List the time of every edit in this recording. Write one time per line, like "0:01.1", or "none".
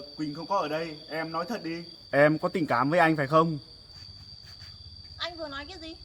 0:01.9
0:03.9